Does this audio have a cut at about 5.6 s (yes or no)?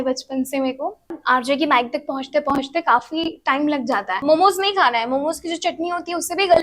no